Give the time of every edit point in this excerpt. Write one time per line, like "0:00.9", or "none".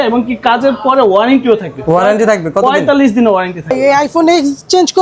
0:03.7